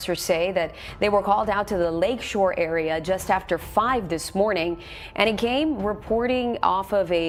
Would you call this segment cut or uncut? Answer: uncut